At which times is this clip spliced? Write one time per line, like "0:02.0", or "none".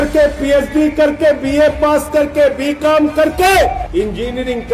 0:03.8